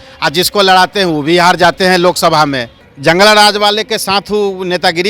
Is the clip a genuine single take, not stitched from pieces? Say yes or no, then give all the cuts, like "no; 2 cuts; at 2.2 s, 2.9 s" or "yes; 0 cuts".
no; 1 cut; at 2.8 s